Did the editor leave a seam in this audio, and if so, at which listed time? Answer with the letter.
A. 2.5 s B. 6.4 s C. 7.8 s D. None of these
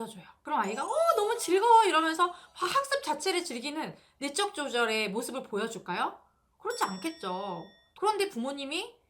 C